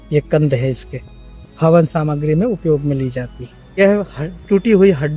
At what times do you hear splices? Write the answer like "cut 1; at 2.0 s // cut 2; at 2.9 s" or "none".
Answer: cut 1; at 3.8 s